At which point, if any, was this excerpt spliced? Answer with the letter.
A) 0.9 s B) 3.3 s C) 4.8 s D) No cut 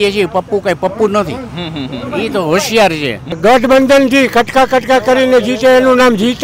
B